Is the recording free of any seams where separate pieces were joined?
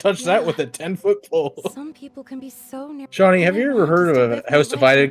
no; 1 cut; at 3.1 s

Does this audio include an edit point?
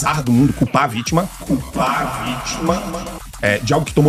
no; 0 cuts

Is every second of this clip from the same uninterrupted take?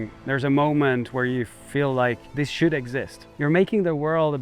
no; 1 cut; at 3.2 s

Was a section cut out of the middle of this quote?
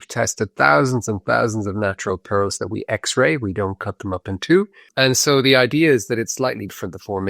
yes; 1 cut; at 4.9 s

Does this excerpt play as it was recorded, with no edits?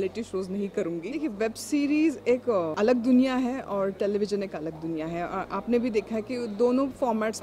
no; 2 cuts; at 1.1 s, 2.5 s

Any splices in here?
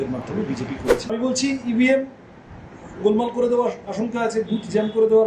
yes; 1 cut; at 1.2 s

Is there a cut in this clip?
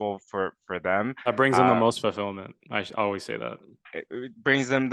no; 0 cuts

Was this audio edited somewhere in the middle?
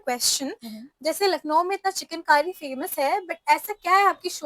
no; 0 cuts

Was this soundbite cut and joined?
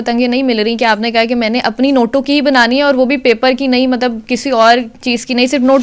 no; 0 cuts

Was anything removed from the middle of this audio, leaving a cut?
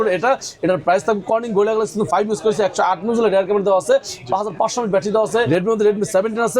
yes; 1 cut; at 5.5 s

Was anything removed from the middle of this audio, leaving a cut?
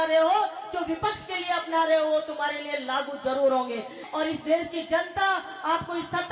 yes; 1 cut; at 4.0 s

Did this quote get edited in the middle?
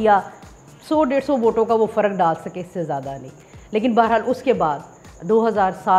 no; 0 cuts

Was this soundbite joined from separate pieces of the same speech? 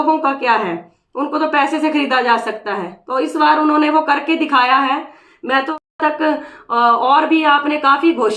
yes; 1 cut; at 5.7 s

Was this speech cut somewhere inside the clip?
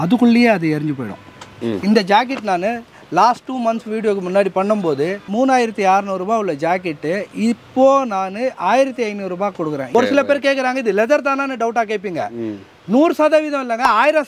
yes; 3 cuts; at 1.6 s, 5.3 s, 9.9 s

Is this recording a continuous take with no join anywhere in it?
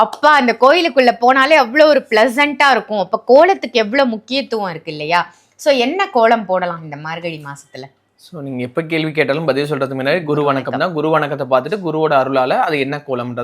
yes; 0 cuts

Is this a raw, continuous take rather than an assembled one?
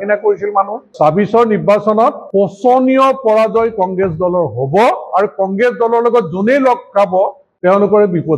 no; 3 cuts; at 0.9 s, 2.2 s, 7.4 s

